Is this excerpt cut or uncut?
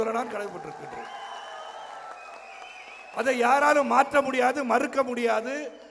uncut